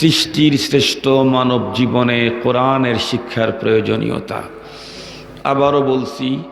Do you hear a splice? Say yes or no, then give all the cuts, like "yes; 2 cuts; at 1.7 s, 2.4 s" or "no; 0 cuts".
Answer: no; 0 cuts